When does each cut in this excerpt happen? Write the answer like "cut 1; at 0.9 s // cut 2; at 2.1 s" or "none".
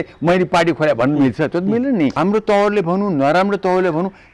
cut 1; at 2.2 s